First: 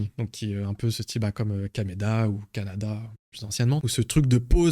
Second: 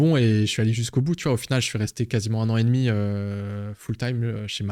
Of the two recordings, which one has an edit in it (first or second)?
first